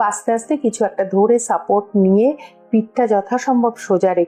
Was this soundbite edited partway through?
no; 0 cuts

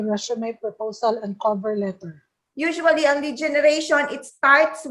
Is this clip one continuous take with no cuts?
no; 1 cut; at 2.4 s

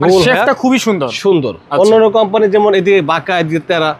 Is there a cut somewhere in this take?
no; 0 cuts

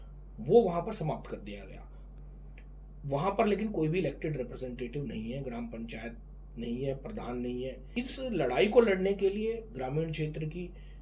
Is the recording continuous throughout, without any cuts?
no; 2 cuts; at 2.1 s, 7.9 s

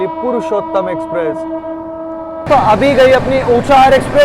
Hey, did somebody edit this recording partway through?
yes; 1 cut; at 2.4 s

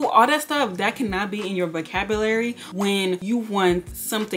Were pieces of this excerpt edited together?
no; 0 cuts

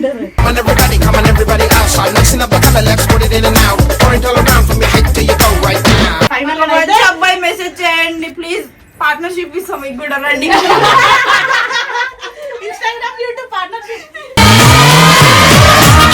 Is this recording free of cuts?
no; 1 cut; at 6.4 s

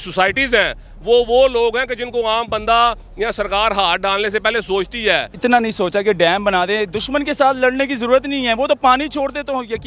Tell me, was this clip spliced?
yes; 1 cut; at 5.3 s

